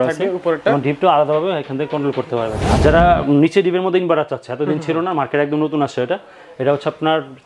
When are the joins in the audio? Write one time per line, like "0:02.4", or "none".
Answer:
0:02.8